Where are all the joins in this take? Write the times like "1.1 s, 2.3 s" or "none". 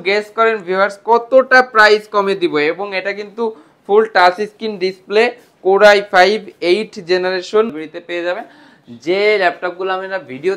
7.7 s